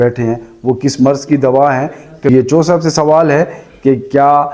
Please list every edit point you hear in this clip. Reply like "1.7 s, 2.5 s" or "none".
2.3 s